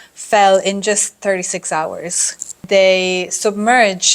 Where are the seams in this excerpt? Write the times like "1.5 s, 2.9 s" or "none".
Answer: 2.6 s